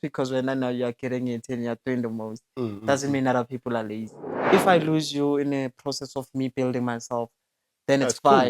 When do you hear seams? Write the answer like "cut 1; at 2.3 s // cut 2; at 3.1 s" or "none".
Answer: cut 1; at 4.5 s